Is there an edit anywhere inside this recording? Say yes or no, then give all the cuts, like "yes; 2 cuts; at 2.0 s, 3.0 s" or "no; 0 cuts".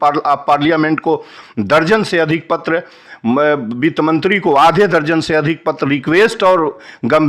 no; 0 cuts